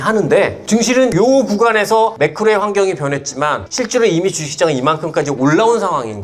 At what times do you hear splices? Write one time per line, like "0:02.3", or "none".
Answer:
0:01.0
0:02.1
0:03.7